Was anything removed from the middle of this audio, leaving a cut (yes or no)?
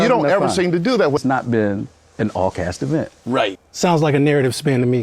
yes